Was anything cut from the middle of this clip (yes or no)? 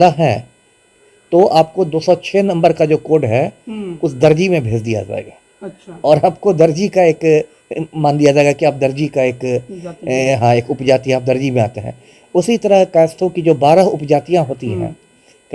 no